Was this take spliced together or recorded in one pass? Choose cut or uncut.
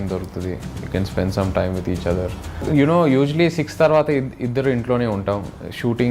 cut